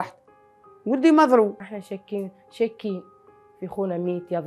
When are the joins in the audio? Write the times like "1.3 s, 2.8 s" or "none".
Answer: none